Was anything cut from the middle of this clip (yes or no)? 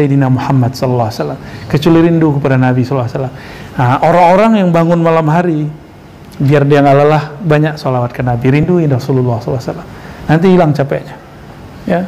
no